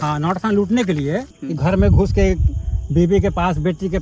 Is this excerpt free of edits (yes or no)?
no